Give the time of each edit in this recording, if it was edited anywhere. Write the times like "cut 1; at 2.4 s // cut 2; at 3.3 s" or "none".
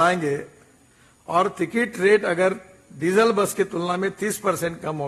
none